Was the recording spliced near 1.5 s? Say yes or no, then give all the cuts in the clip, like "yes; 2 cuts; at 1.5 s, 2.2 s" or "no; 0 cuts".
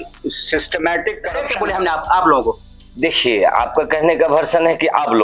yes; 1 cut; at 1.5 s